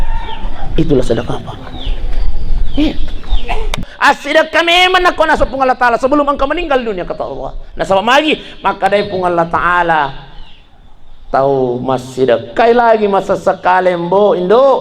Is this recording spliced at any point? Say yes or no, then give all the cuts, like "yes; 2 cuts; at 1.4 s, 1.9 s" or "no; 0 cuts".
yes; 1 cut; at 3.9 s